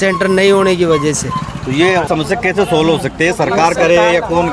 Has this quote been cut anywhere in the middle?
yes; 1 cut; at 2.1 s

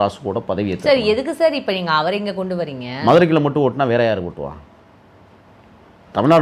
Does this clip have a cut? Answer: no; 0 cuts

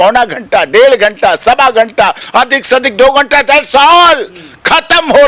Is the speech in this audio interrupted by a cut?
no; 0 cuts

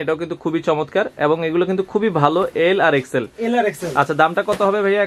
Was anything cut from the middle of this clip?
no; 0 cuts

